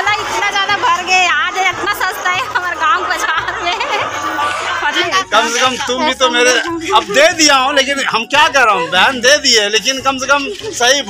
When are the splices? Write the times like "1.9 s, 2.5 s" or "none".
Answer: 5.0 s